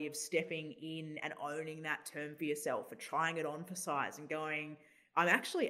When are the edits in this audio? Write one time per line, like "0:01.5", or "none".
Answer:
none